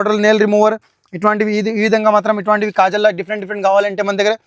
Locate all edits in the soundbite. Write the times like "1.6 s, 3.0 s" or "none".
none